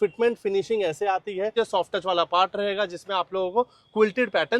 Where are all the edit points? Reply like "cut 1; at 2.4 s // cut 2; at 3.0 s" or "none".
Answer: cut 1; at 1.5 s